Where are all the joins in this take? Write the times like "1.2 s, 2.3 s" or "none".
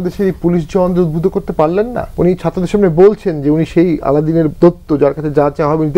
2.0 s